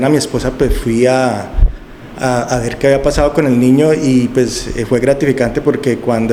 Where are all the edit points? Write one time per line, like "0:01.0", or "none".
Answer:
none